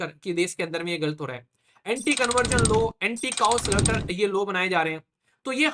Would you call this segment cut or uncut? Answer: uncut